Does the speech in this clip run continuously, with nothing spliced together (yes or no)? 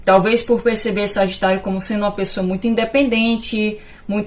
yes